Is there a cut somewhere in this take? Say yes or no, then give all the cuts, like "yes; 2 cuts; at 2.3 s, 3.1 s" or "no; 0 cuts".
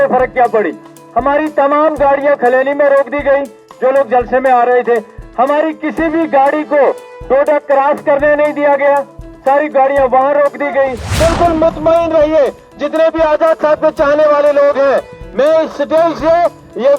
yes; 1 cut; at 11.0 s